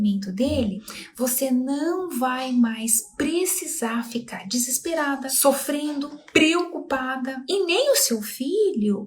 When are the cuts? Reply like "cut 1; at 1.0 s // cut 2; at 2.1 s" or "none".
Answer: cut 1; at 5.3 s // cut 2; at 6.2 s